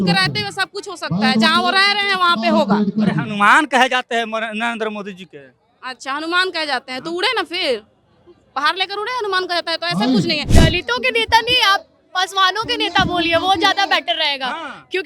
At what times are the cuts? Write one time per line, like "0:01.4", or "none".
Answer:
0:10.5